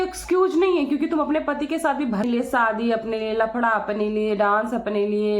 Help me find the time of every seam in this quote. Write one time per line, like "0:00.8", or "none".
0:02.2